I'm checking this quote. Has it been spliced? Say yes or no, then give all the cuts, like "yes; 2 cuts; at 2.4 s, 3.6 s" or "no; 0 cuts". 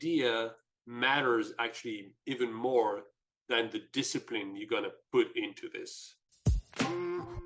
yes; 1 cut; at 6.3 s